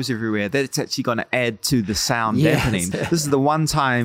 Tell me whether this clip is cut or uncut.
cut